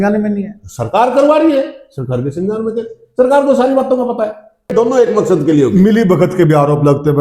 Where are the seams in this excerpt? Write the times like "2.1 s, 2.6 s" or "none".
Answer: 4.7 s

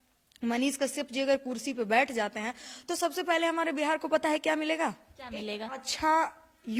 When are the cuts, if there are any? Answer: none

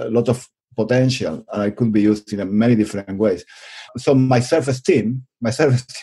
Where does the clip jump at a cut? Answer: 3.8 s

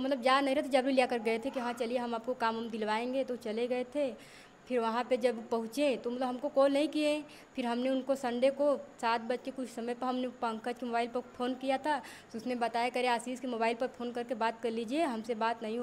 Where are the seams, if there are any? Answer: none

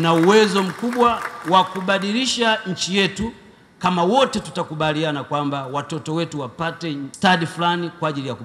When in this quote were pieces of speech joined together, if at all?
7.1 s

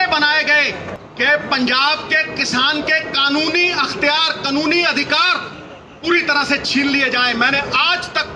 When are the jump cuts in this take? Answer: none

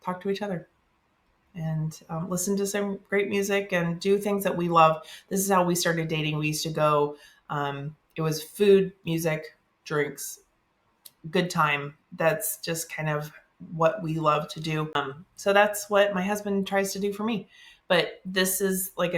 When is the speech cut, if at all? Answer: 15.0 s

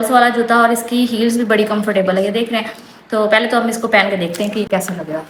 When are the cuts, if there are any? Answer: none

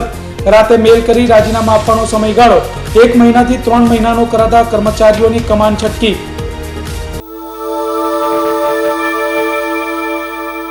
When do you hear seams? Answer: 7.2 s

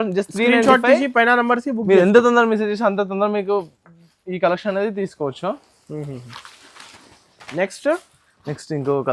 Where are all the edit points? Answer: none

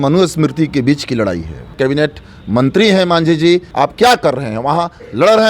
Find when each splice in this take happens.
1.7 s, 3.7 s

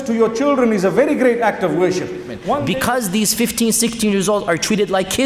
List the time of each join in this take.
2.5 s

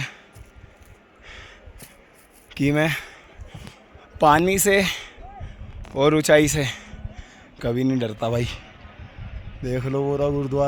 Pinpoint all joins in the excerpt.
none

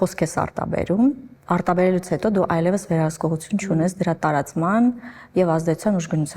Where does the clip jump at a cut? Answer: 1.3 s

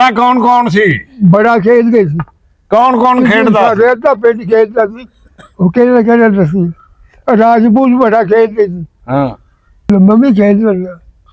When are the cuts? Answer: 9.9 s

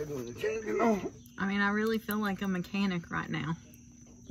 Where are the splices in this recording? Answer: 1.2 s

